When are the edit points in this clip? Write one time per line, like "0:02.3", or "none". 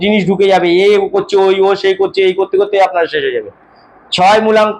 none